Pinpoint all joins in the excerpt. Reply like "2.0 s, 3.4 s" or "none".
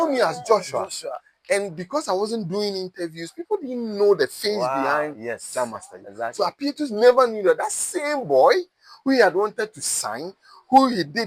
none